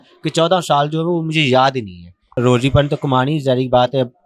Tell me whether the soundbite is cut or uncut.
cut